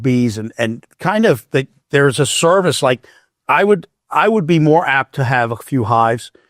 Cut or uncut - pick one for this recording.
uncut